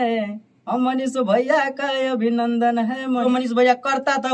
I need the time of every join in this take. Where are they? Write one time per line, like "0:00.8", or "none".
0:03.2

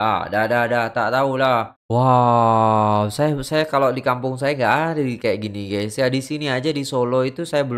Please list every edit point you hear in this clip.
0:01.8

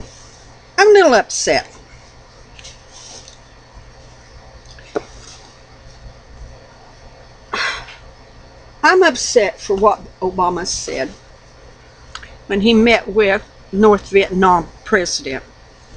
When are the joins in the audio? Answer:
0:14.8

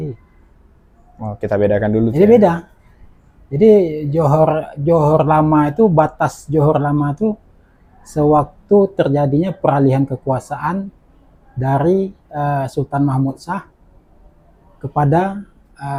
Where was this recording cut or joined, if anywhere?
none

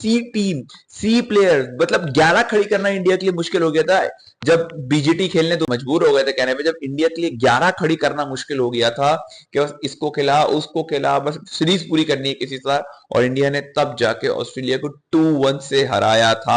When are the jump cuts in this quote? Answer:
0:05.7

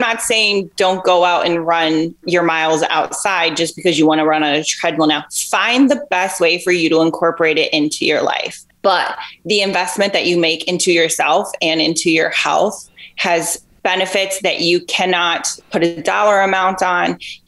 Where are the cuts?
0:02.2

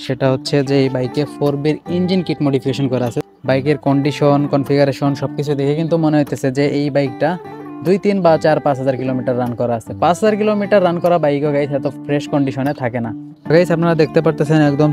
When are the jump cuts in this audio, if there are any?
0:03.2
0:13.4

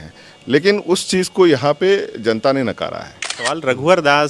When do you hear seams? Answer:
0:03.4

